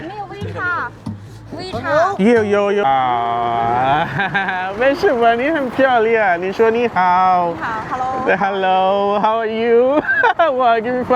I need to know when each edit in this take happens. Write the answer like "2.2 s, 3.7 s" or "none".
2.8 s